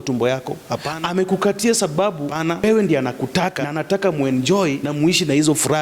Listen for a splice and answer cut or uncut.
cut